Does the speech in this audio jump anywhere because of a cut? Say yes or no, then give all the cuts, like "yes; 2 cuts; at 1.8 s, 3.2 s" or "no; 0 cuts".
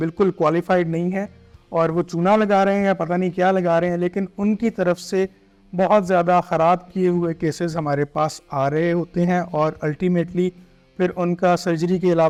no; 0 cuts